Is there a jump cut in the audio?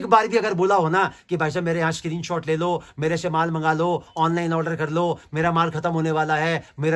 no; 0 cuts

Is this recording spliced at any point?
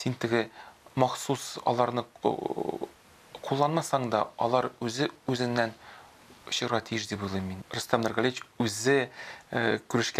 yes; 1 cut; at 7.6 s

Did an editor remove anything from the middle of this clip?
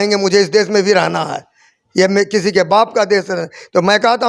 no; 0 cuts

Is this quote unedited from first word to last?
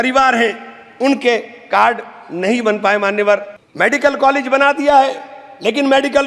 no; 1 cut; at 3.6 s

